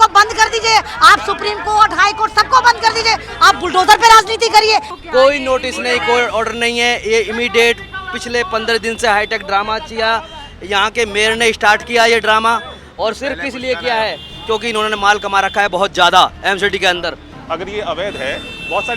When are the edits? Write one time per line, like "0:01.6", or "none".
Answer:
0:04.9
0:17.3